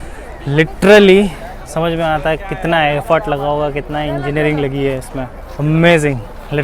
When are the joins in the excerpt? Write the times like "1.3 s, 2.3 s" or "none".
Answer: 5.4 s